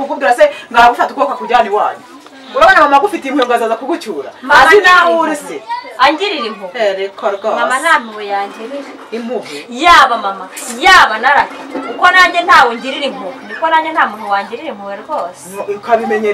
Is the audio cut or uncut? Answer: uncut